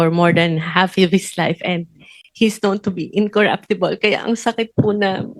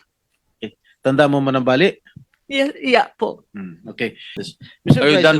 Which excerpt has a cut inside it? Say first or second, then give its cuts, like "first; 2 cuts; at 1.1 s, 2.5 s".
second; 1 cut; at 4.4 s